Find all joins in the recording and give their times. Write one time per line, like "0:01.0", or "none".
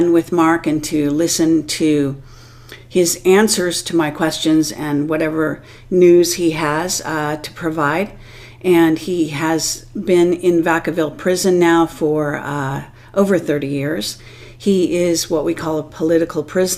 0:03.2